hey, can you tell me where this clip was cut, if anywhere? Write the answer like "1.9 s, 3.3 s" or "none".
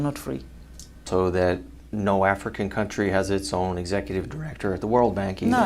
1.1 s